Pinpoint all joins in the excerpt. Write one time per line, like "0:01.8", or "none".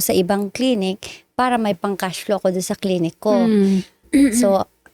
none